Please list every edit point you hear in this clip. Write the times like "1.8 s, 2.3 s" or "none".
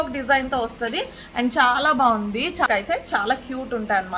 2.7 s